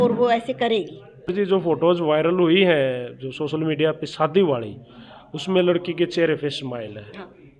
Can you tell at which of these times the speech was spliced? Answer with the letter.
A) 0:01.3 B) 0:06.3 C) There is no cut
A